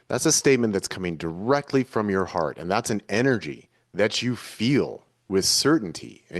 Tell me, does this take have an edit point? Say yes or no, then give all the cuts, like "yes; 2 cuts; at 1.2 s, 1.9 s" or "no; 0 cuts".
no; 0 cuts